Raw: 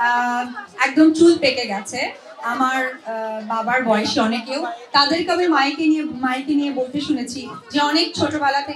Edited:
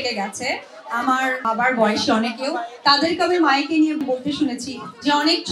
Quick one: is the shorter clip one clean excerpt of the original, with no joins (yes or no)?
no